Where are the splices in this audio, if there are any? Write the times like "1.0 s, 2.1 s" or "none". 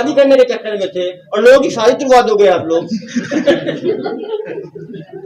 none